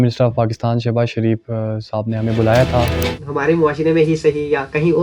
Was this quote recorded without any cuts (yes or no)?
no